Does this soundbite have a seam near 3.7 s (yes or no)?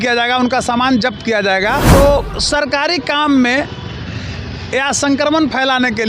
no